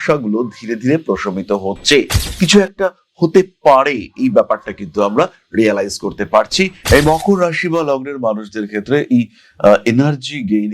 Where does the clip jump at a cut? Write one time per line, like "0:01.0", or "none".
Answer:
0:02.2
0:06.8